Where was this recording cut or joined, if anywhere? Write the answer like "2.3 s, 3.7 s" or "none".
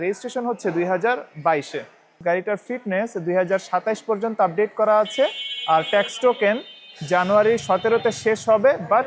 2.2 s